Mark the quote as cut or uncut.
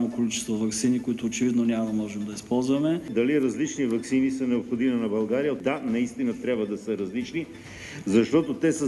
cut